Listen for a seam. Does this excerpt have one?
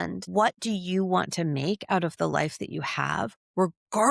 no; 0 cuts

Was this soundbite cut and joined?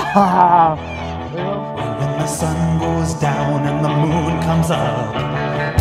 yes; 1 cut; at 1.3 s

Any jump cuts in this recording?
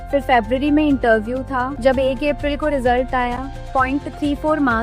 yes; 1 cut; at 1.7 s

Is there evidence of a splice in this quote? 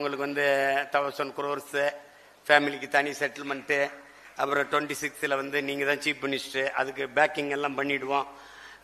no; 0 cuts

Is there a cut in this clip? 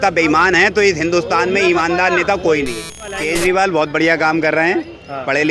yes; 1 cut; at 3.1 s

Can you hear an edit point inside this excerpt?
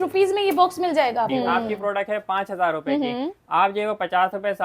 yes; 1 cut; at 1.3 s

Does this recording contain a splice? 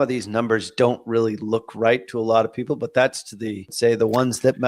yes; 1 cut; at 3.7 s

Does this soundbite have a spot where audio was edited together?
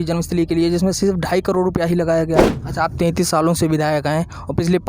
yes; 1 cut; at 2.6 s

